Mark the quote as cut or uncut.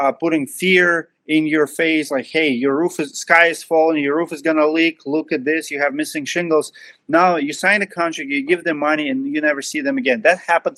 uncut